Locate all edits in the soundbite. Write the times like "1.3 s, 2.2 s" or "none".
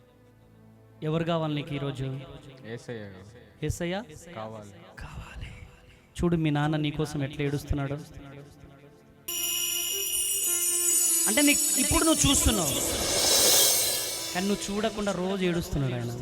9.3 s